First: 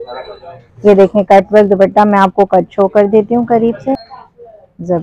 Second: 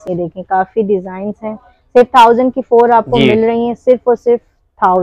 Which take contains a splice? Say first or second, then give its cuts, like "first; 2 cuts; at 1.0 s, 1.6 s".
first; 1 cut; at 3.6 s